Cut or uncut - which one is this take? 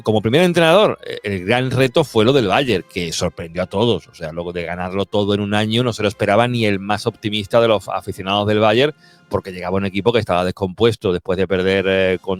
uncut